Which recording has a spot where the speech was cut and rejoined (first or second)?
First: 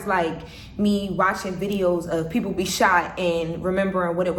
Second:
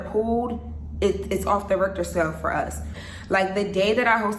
second